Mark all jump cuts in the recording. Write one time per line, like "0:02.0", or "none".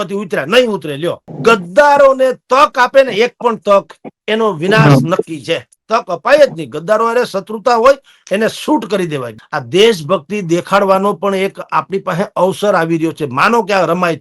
0:01.3
0:09.3